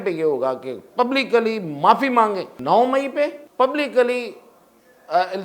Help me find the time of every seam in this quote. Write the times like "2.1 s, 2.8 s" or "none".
2.5 s, 3.4 s